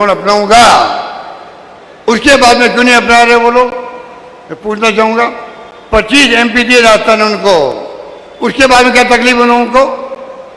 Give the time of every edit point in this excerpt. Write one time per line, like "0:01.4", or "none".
none